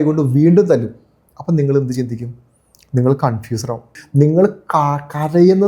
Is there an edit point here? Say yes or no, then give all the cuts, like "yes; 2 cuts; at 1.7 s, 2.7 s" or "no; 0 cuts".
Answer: yes; 1 cut; at 4.0 s